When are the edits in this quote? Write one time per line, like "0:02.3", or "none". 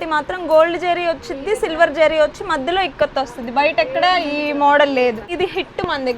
0:05.3